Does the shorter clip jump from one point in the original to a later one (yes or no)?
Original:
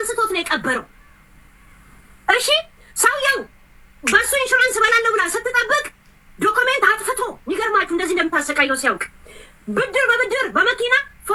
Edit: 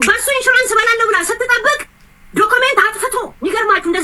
no